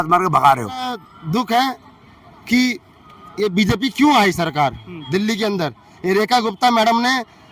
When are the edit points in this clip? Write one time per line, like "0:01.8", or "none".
0:01.1